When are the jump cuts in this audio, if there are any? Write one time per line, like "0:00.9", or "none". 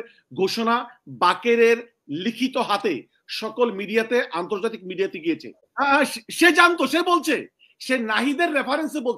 0:05.6